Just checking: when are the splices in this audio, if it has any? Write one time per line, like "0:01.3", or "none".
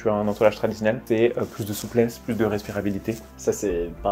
0:01.0
0:03.3

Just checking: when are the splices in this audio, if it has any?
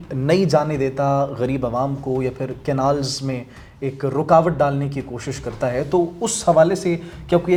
none

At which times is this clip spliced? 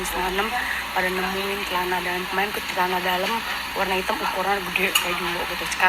none

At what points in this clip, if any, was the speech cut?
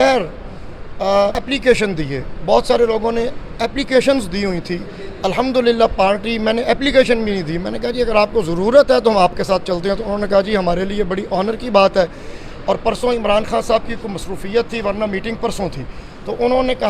0:01.4

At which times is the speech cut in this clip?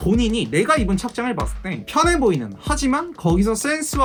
none

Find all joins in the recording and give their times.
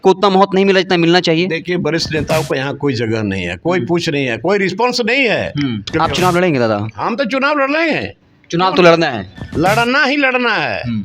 0:05.9

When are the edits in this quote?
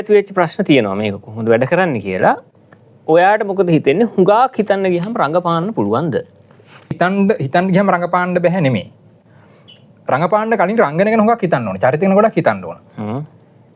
0:07.0

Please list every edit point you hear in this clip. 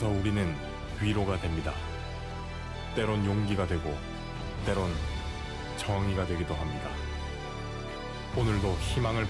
none

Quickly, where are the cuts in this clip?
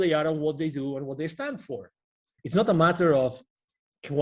0:02.3

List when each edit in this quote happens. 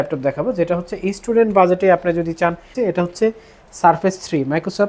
0:02.7

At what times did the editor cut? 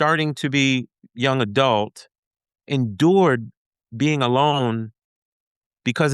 0:01.0
0:02.6

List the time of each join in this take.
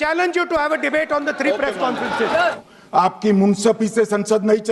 0:02.6

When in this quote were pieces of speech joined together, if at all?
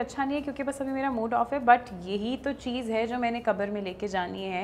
none

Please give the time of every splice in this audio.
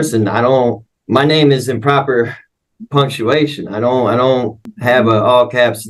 0:00.9
0:04.7

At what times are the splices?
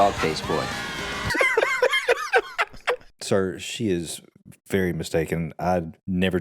0:01.3
0:03.1

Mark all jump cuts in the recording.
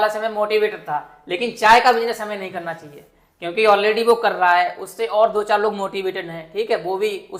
none

